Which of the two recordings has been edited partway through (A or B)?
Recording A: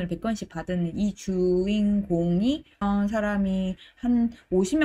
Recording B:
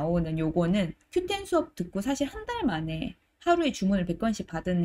A